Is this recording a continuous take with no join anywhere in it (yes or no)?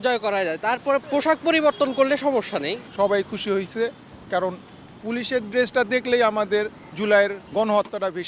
no